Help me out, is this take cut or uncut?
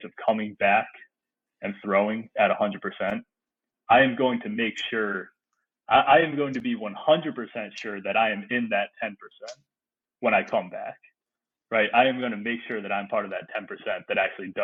uncut